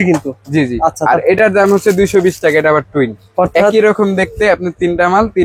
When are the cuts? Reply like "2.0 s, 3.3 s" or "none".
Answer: none